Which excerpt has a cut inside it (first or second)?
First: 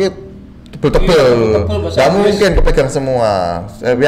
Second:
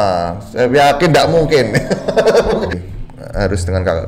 second